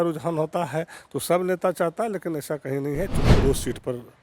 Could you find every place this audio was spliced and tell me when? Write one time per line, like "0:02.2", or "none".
0:03.2